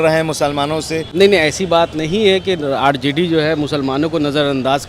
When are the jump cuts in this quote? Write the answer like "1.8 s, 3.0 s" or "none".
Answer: 1.0 s